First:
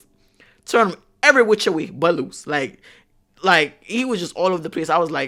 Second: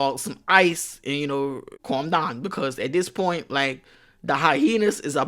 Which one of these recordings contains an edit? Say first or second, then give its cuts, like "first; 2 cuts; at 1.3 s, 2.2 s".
second; 1 cut; at 1.7 s